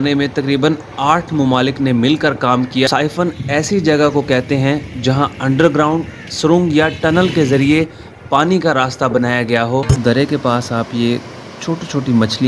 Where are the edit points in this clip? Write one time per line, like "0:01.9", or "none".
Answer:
0:02.9
0:09.9